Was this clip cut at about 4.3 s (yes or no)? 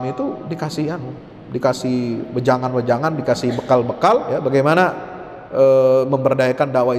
yes